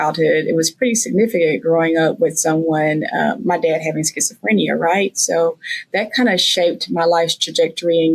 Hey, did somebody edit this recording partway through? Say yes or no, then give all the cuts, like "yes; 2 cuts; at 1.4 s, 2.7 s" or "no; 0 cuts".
no; 0 cuts